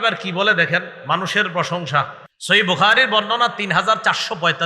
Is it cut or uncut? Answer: cut